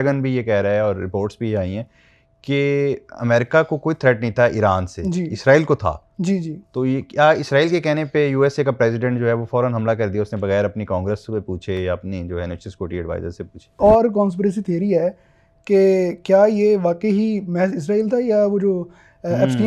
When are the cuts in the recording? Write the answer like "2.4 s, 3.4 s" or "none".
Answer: 13.8 s